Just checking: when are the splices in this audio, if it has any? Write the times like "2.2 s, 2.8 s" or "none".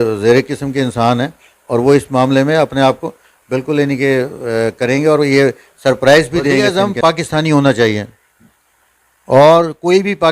6.7 s

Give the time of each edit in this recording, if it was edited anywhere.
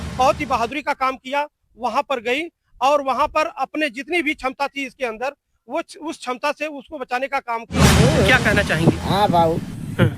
7.9 s

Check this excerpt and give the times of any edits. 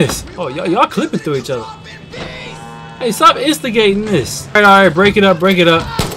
4.6 s

